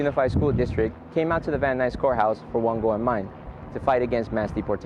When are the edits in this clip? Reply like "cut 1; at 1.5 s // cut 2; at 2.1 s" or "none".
none